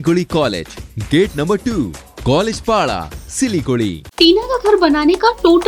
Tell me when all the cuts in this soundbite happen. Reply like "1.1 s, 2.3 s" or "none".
4.0 s